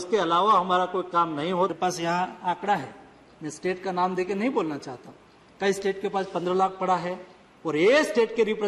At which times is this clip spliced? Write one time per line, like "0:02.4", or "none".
0:01.7